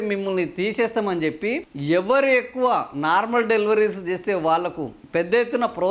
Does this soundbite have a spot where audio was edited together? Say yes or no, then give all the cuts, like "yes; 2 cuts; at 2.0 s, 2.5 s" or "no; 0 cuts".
no; 0 cuts